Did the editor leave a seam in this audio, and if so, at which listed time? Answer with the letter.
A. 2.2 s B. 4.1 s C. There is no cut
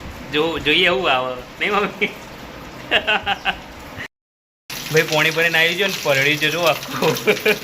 B